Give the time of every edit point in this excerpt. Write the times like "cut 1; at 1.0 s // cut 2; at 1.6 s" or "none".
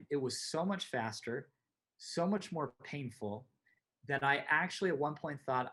none